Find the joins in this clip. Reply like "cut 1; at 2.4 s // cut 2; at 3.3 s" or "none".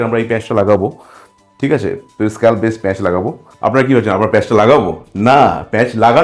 cut 1; at 3.4 s